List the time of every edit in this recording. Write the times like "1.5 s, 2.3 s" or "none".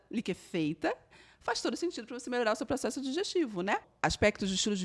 3.9 s